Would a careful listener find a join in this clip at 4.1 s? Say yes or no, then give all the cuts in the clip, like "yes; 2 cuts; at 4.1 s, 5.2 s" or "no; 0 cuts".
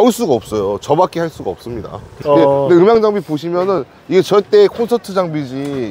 no; 1 cut; at 2.1 s